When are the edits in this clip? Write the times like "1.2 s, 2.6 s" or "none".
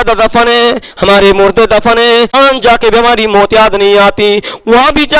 2.3 s

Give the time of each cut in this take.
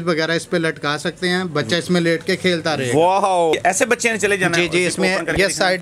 3.5 s

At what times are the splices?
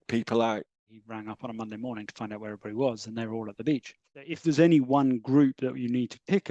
0.9 s, 4.4 s

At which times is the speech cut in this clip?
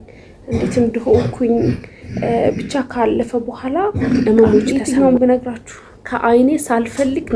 4.7 s

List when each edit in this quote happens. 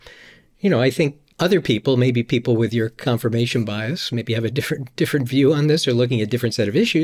1.2 s

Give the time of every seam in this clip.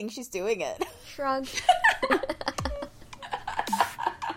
1.0 s

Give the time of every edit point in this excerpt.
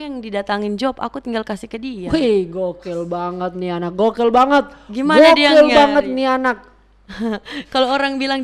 none

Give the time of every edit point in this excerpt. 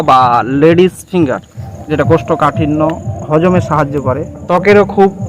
1.7 s, 4.4 s

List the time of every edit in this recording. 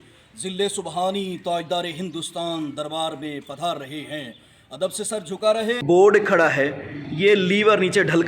5.8 s

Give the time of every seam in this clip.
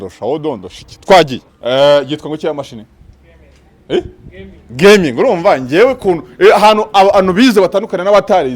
1.5 s

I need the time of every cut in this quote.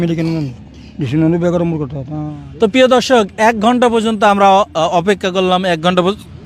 none

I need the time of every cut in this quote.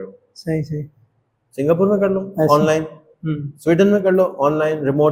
none

